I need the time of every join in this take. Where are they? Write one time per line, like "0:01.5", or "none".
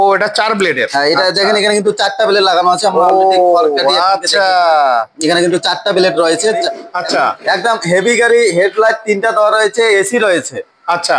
0:06.9